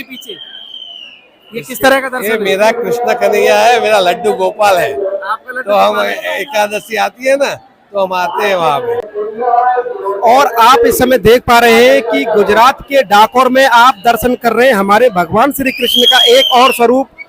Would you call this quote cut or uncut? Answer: cut